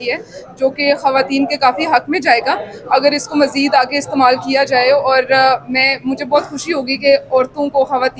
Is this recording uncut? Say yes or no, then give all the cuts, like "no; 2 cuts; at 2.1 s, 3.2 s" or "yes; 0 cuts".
yes; 0 cuts